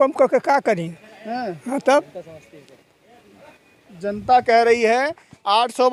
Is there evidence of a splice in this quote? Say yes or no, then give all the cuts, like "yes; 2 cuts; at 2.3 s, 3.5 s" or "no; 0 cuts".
no; 0 cuts